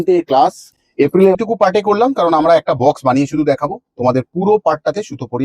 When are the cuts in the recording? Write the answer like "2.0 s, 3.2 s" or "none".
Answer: 1.4 s